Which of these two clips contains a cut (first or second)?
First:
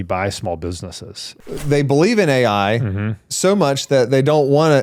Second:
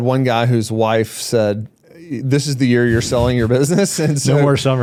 first